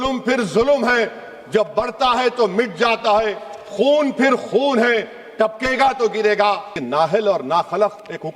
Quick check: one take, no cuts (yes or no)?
no